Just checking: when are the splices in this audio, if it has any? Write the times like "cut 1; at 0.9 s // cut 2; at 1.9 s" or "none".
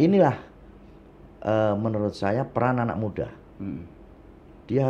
none